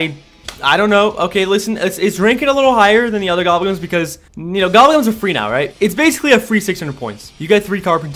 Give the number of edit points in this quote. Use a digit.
0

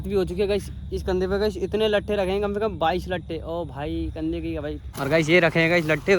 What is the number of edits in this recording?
1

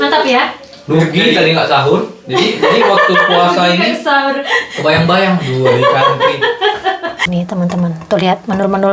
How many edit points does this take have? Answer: 1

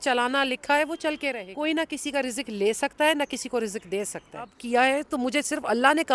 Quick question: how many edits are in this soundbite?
2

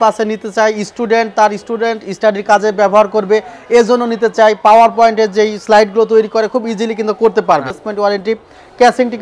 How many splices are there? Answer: 1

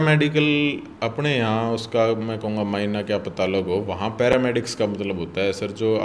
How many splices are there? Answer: 0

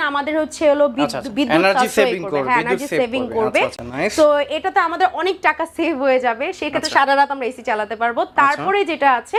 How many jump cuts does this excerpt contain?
0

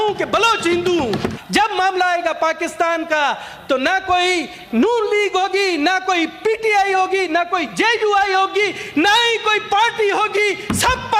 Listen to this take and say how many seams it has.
1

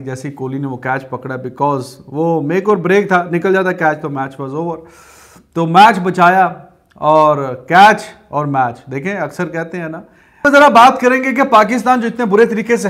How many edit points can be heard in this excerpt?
0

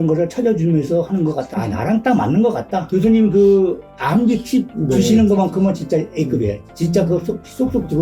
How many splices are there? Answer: 2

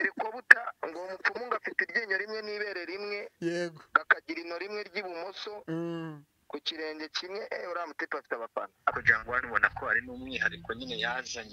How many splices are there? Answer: 1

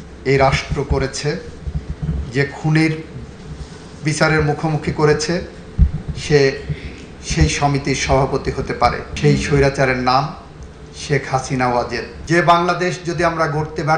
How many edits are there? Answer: 1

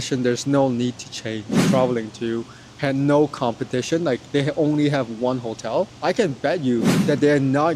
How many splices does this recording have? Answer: 2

